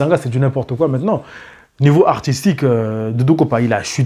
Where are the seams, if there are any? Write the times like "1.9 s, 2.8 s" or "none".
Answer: none